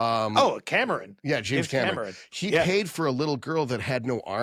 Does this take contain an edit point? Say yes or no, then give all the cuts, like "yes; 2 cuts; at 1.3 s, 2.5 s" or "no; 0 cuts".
no; 0 cuts